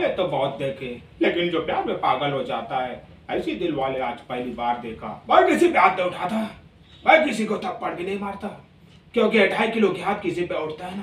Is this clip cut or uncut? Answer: cut